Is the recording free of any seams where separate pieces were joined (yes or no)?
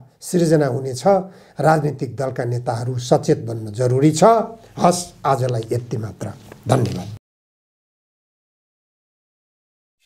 yes